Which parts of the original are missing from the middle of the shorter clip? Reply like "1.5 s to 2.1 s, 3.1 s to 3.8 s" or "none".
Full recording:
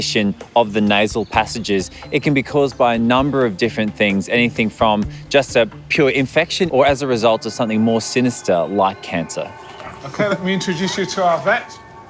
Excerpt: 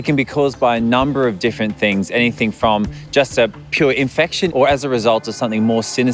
none